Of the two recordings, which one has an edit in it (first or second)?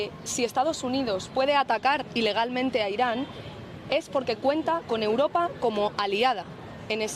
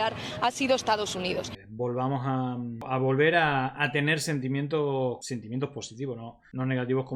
second